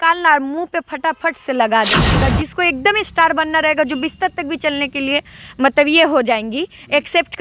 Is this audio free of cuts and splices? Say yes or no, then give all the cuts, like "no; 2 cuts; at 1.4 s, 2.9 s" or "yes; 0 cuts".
no; 1 cut; at 2.0 s